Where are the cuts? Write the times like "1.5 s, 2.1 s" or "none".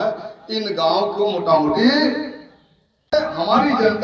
3.1 s